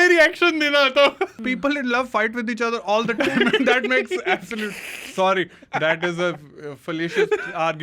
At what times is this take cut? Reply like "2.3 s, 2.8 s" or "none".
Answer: 1.4 s

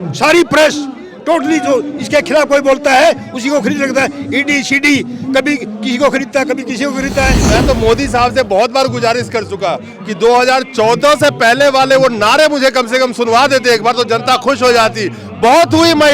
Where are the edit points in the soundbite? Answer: 7.4 s

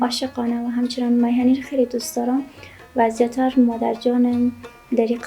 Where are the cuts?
none

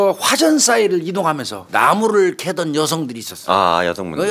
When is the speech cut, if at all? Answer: 1.5 s

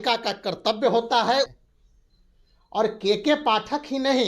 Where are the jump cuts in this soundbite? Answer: 1.6 s

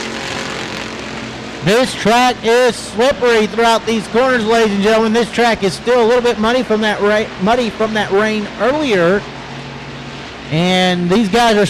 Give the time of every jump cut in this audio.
5.9 s

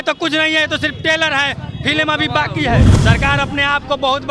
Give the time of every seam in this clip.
2.9 s

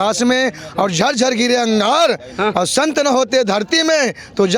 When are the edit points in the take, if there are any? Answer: none

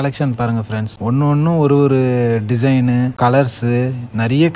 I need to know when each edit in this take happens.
none

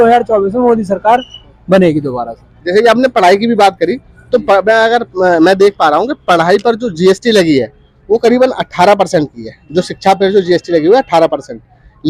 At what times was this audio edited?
none

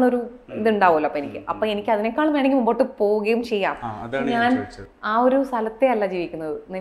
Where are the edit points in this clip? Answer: none

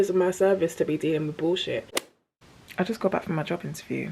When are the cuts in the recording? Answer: 1.9 s

